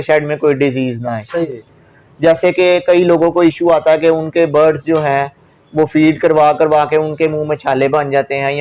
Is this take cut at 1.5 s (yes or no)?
yes